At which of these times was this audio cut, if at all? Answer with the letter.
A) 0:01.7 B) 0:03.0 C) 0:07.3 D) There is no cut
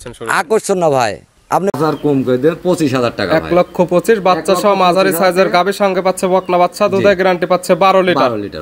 A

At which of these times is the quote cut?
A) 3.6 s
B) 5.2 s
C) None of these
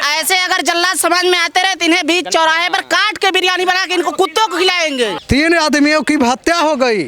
B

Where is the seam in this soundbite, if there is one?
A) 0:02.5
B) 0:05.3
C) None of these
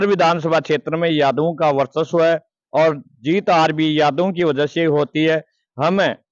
C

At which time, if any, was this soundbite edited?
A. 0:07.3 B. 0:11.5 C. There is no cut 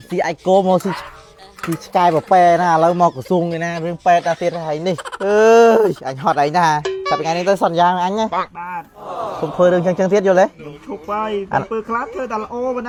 C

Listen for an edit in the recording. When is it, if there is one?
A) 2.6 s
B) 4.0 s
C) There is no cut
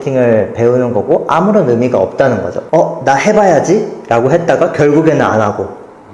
A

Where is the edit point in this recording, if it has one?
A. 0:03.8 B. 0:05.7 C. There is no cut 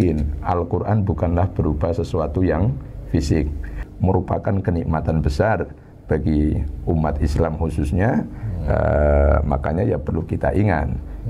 A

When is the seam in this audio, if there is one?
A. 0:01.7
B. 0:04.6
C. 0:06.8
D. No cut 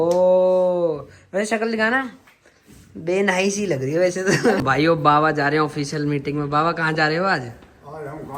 B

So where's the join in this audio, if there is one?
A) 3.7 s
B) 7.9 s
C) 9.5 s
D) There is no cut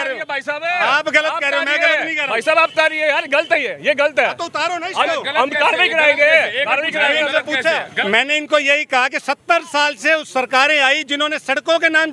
B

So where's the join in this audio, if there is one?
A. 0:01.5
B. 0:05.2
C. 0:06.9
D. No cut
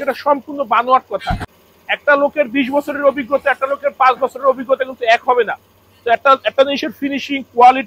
A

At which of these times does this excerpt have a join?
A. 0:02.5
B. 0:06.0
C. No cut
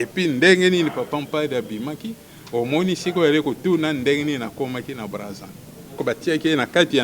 B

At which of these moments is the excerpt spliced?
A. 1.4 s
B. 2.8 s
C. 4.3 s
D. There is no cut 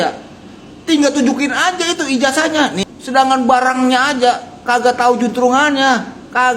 B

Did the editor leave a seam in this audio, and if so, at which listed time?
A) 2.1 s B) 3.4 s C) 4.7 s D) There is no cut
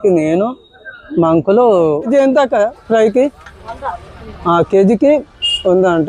A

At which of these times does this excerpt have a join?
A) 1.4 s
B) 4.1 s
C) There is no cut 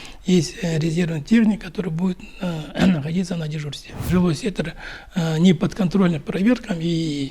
B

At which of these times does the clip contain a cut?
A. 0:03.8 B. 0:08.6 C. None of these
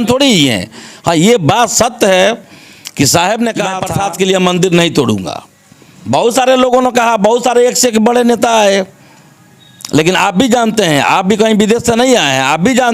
A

